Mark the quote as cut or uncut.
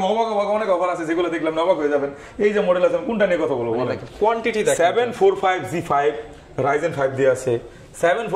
uncut